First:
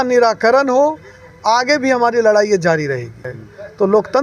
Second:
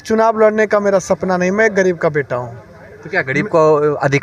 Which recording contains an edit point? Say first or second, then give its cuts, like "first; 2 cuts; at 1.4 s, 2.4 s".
first; 1 cut; at 3.3 s